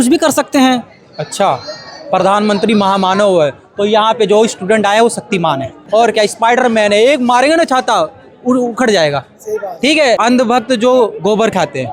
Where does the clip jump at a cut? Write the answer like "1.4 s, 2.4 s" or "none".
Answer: 5.8 s, 10.2 s